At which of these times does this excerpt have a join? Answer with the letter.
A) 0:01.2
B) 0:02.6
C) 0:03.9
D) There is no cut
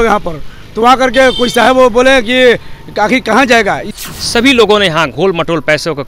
C